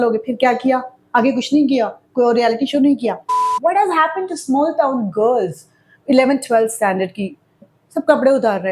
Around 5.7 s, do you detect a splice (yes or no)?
no